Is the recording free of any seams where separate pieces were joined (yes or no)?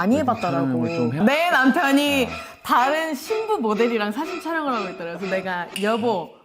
no